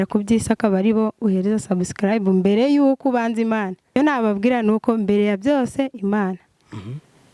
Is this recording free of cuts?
no; 1 cut; at 3.9 s

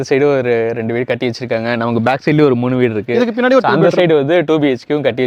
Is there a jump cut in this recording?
no; 0 cuts

